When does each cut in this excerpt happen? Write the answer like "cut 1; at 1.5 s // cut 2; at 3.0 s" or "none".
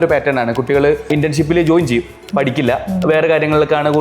cut 1; at 1.1 s